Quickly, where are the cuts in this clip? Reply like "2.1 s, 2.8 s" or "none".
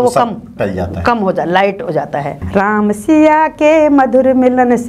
2.3 s